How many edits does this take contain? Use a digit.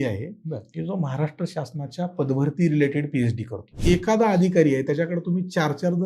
1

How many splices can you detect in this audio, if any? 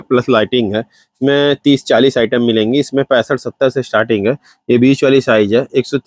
0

